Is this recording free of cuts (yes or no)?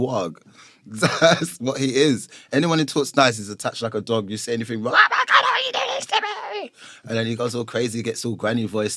yes